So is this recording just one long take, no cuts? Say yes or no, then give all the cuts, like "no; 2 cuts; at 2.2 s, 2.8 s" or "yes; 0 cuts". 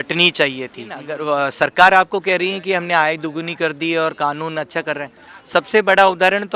no; 1 cut; at 1.1 s